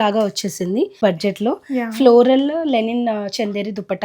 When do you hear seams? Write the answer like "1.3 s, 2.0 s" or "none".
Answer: 1.0 s

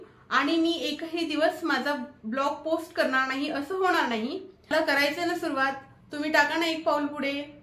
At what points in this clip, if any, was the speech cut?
4.7 s

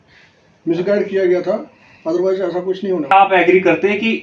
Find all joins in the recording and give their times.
3.1 s

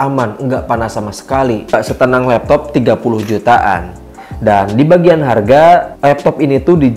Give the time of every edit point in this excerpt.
1.8 s

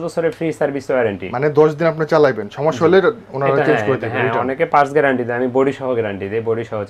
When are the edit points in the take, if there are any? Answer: none

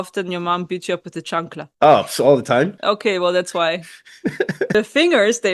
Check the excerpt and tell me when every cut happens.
1.6 s, 2.8 s, 4.7 s

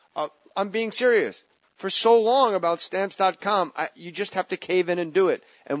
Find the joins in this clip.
2.4 s

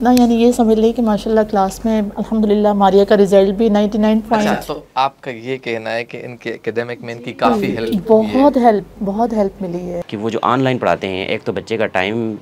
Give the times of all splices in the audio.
2.2 s, 10.0 s

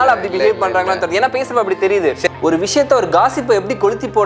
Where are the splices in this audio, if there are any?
2.3 s

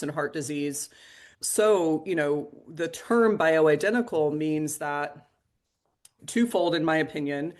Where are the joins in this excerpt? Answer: 6.2 s

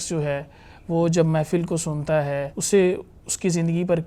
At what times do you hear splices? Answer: 2.5 s

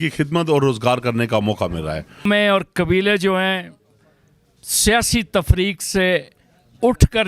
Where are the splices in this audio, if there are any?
2.2 s

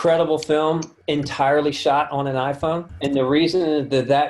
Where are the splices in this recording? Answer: 0.9 s, 2.9 s

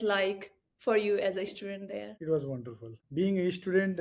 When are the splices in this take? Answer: none

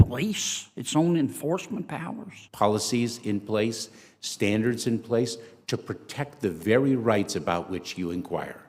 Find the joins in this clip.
2.5 s

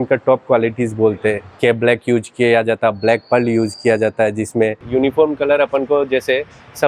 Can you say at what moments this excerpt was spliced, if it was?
1.5 s, 4.8 s

